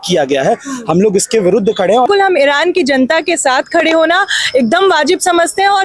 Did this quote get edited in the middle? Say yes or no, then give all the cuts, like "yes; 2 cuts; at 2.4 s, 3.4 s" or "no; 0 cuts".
yes; 1 cut; at 2.1 s